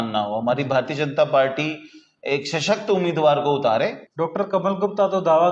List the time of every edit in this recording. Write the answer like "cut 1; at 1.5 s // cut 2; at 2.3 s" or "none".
cut 1; at 4.0 s